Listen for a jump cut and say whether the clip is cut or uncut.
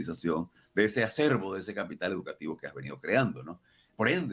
uncut